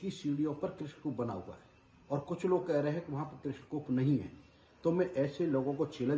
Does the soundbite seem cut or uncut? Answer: uncut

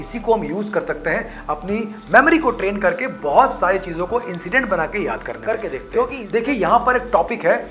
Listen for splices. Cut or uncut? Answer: cut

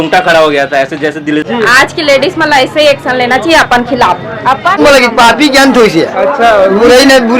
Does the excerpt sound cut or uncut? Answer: cut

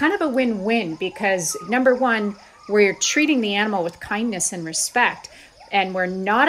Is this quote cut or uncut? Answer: cut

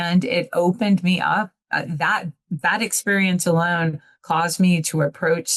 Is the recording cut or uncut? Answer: uncut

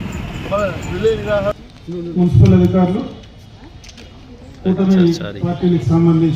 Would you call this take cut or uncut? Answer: cut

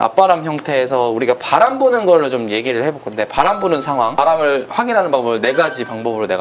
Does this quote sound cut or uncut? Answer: uncut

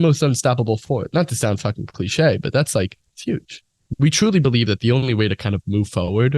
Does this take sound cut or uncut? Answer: cut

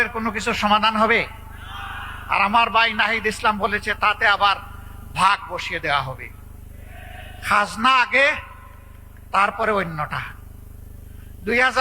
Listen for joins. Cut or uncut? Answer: uncut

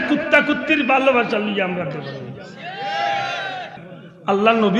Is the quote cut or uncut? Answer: cut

